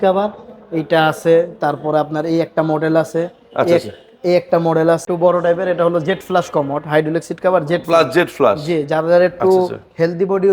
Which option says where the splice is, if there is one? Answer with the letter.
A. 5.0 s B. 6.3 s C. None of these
A